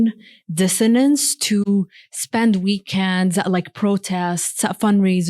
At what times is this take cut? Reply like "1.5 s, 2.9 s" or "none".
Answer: none